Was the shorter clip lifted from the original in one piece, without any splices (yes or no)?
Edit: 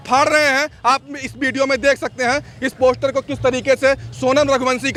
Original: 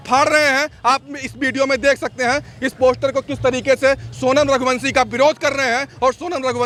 yes